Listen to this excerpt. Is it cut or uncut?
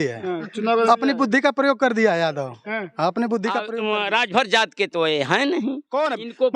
cut